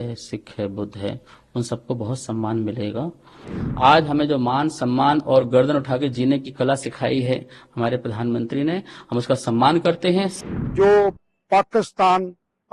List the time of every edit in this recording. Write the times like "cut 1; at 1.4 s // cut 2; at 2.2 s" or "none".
cut 1; at 3.5 s // cut 2; at 10.4 s